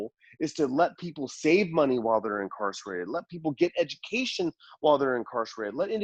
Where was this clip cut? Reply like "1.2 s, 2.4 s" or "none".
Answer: none